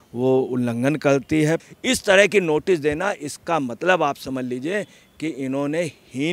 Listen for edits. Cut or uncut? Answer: cut